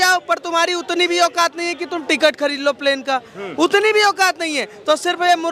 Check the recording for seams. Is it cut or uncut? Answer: uncut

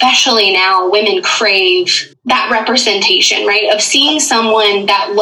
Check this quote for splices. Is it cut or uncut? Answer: cut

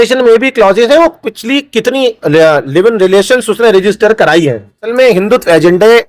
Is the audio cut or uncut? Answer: cut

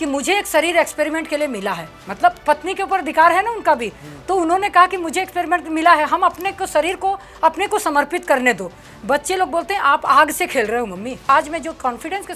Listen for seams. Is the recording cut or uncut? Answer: cut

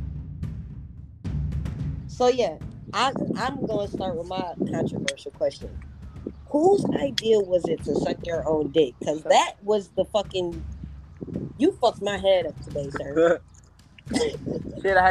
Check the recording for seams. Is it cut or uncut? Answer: cut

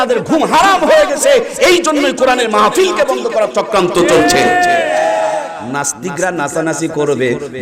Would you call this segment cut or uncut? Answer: cut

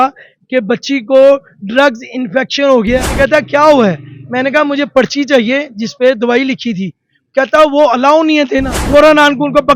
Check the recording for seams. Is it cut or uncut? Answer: cut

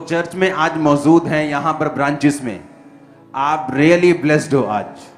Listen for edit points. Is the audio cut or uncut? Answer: uncut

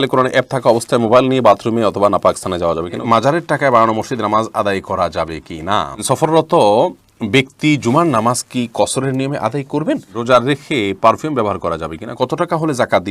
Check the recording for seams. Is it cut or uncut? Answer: cut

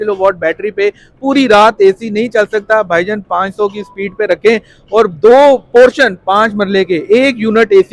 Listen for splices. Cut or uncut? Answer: uncut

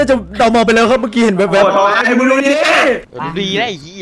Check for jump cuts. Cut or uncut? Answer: uncut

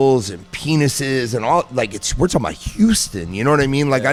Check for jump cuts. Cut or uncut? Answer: uncut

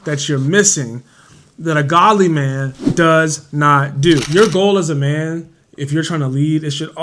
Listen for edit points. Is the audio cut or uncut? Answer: cut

